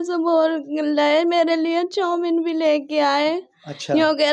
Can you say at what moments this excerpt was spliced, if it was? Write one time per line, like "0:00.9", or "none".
none